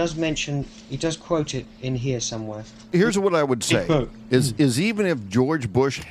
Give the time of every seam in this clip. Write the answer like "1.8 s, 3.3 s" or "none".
2.9 s

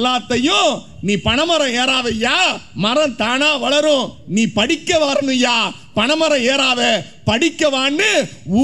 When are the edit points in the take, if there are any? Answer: none

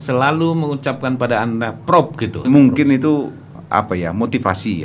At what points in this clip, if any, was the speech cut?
2.4 s, 3.6 s

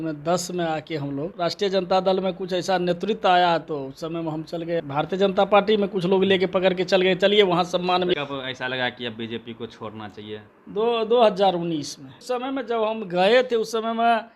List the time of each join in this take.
1.3 s, 4.8 s, 8.2 s, 12.2 s

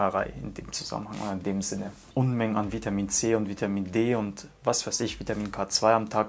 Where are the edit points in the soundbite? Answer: 2.1 s

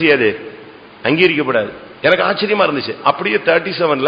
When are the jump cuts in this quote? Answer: none

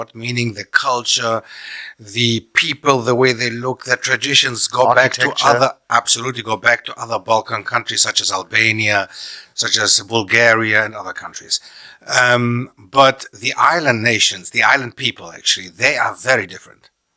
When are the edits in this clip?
none

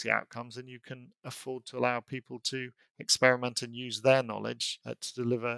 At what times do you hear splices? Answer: none

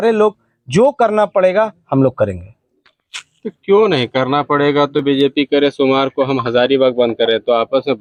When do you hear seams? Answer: none

